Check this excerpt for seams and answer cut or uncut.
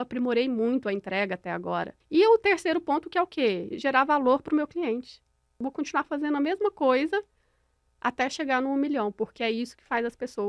cut